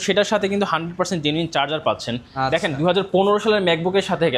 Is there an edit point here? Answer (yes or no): no